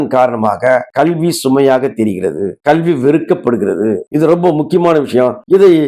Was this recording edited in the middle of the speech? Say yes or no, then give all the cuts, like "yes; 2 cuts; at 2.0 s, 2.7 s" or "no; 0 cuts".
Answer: no; 0 cuts